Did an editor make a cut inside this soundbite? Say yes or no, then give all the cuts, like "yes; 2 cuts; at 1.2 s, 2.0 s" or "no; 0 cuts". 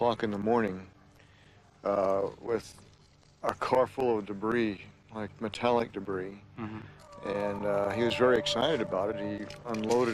no; 0 cuts